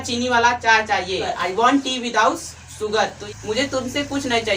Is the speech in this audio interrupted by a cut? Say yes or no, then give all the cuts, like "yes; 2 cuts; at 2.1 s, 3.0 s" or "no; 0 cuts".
yes; 2 cuts; at 1.3 s, 3.2 s